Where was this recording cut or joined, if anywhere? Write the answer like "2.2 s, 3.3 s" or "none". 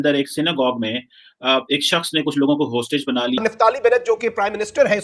3.4 s